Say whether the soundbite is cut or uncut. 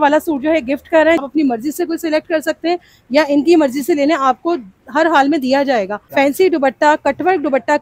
cut